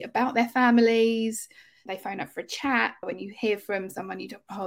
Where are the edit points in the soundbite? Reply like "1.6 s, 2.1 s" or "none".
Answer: 1.8 s, 3.0 s